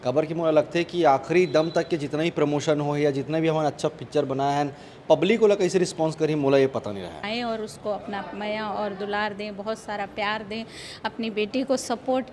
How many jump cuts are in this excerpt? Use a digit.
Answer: 1